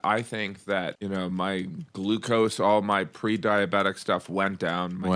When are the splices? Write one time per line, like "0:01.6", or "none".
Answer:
0:01.0

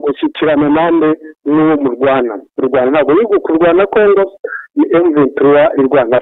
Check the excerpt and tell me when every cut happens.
none

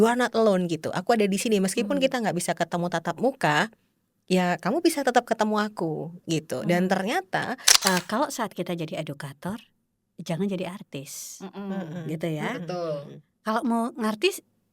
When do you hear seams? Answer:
0:07.6

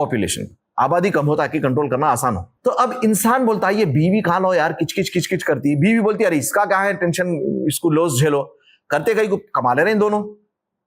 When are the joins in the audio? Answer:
0:02.5

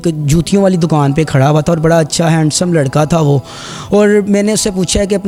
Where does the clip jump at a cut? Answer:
none

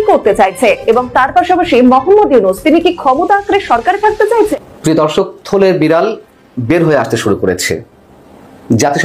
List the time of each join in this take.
0:04.5

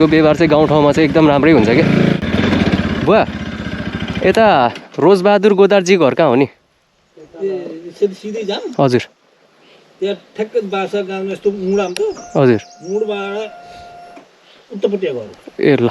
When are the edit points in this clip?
0:02.2

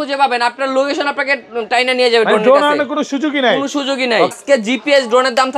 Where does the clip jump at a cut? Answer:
0:04.3

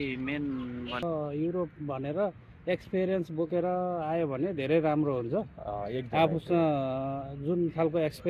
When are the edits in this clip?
0:01.0

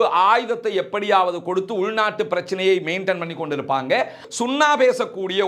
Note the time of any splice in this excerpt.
0:04.2

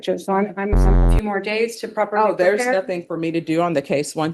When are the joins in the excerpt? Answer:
0:01.1

